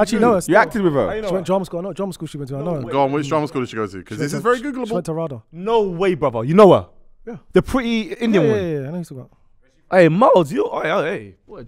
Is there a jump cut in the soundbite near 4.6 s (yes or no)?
no